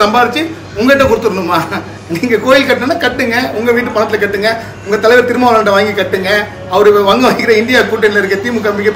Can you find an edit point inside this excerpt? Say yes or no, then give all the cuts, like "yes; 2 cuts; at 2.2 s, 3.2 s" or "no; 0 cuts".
no; 0 cuts